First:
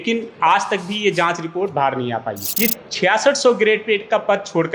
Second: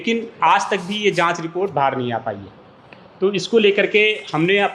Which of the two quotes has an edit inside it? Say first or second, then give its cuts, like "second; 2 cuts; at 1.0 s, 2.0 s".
first; 1 cut; at 2.4 s